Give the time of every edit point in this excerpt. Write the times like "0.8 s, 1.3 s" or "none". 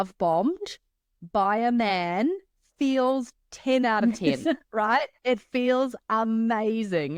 none